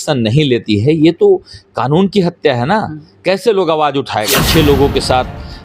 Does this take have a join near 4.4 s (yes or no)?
yes